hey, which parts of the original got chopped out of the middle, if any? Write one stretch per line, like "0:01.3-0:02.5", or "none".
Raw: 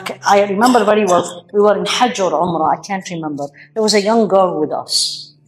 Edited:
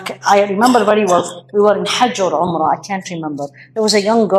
none

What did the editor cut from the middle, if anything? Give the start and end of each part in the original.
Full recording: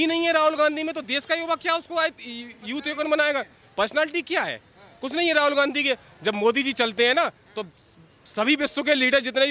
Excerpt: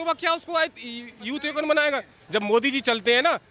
0:03.6-0:06.1

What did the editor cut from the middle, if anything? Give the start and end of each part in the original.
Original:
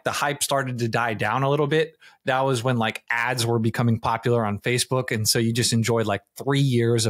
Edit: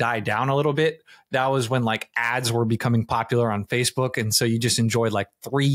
none

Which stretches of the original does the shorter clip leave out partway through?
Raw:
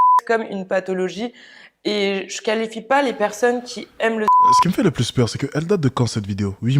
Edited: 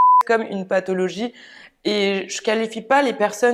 none

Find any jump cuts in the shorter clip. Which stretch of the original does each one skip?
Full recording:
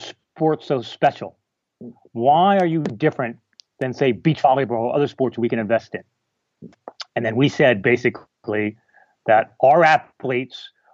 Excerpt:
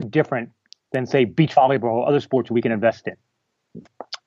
none

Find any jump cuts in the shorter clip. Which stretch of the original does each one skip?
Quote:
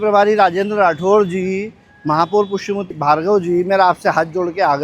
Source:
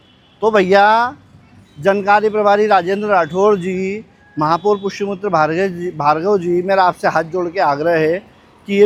0:05.2-0:05.9

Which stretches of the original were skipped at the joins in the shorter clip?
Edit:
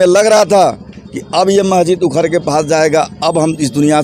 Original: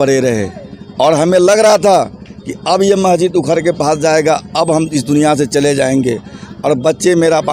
none

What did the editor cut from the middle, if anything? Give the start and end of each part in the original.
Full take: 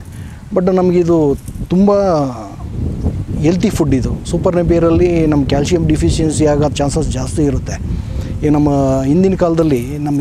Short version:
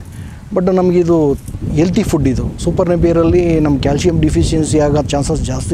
0:01.5-0:03.2

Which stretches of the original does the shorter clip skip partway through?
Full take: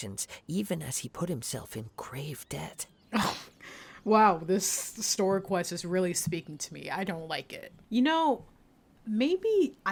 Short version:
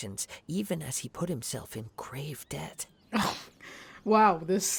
none

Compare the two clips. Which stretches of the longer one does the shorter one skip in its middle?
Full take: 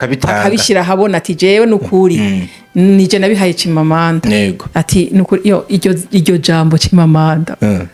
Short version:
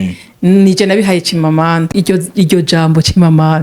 0:04.2-0:05.6

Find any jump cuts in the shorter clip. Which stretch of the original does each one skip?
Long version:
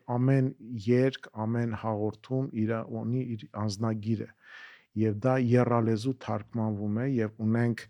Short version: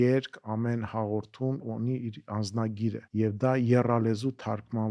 0:02.5-0:02.9
0:04.3-0:04.8

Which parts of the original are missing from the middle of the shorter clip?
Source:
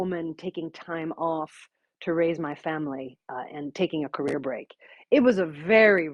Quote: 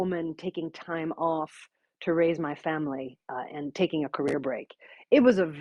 none

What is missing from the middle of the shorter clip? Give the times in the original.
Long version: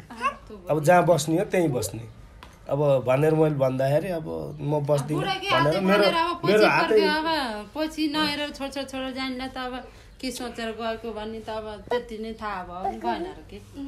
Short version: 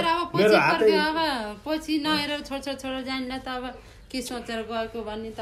none

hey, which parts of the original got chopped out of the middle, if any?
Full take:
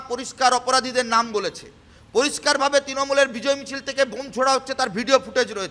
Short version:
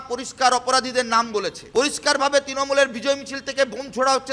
0:01.6-0:02.0

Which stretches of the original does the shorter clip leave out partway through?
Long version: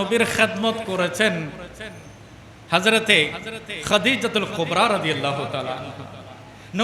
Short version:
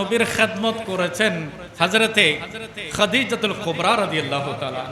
0:01.6-0:02.5

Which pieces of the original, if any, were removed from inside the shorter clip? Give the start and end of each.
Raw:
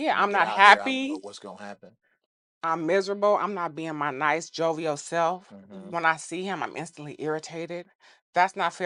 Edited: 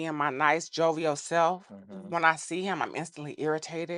none

